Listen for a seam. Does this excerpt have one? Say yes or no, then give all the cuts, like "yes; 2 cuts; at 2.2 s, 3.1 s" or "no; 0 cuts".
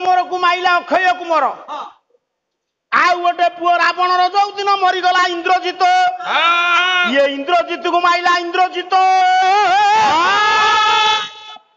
no; 0 cuts